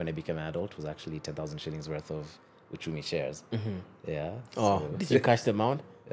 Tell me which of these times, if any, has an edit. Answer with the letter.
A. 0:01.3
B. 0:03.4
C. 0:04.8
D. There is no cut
D